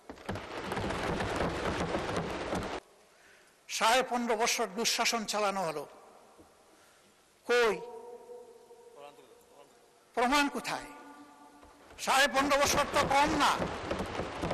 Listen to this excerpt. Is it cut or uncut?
cut